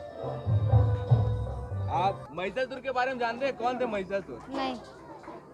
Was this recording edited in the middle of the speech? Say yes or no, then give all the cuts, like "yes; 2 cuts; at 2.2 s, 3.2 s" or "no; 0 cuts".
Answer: yes; 1 cut; at 2.7 s